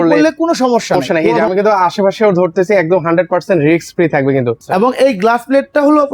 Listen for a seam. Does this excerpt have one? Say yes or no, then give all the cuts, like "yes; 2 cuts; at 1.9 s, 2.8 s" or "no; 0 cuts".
yes; 2 cuts; at 1.0 s, 4.6 s